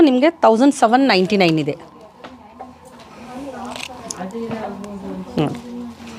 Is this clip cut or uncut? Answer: uncut